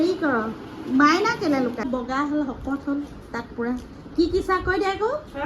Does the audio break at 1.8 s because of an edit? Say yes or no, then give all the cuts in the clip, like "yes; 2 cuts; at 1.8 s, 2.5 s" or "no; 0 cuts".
yes; 1 cut; at 1.8 s